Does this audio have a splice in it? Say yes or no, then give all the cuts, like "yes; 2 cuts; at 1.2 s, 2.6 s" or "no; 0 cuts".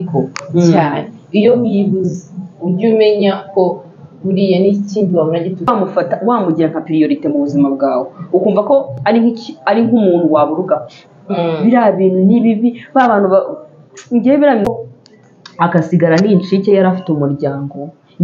yes; 2 cuts; at 5.7 s, 14.7 s